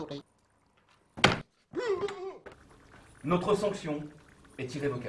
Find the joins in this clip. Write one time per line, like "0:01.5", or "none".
none